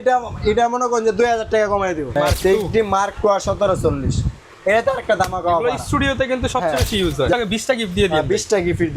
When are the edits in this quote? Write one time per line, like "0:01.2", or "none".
0:02.1
0:07.3